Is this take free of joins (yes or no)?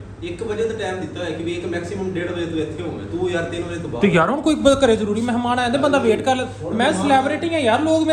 yes